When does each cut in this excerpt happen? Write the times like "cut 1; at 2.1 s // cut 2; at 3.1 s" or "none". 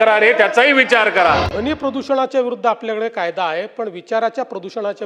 cut 1; at 1.4 s